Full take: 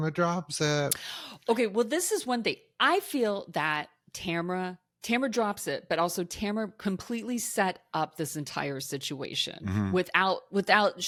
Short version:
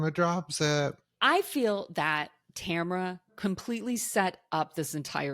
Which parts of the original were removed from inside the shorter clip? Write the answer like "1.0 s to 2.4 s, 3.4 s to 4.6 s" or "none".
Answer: 1.1 s to 2.7 s, 4.9 s to 6.7 s